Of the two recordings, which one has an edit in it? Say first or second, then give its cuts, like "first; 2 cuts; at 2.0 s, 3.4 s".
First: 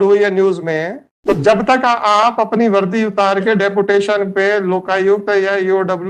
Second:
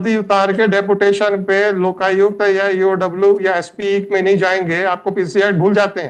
first; 1 cut; at 1.4 s